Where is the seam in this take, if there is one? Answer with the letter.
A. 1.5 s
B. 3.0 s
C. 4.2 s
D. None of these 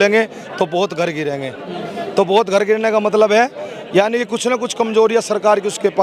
D